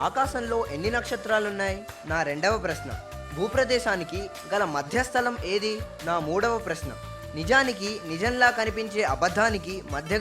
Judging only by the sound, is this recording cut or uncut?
cut